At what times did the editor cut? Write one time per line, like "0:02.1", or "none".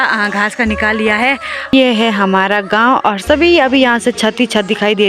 0:01.7

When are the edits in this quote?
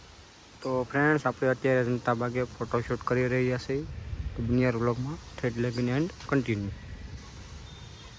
none

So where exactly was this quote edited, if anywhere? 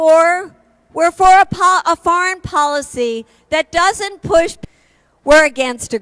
none

